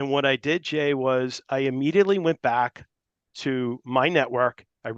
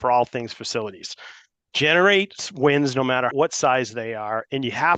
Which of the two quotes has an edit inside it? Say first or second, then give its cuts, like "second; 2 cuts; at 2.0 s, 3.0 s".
second; 1 cut; at 3.3 s